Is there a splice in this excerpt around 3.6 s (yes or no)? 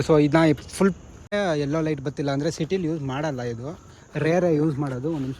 no